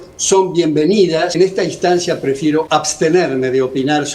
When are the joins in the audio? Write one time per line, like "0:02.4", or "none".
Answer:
0:01.3
0:02.7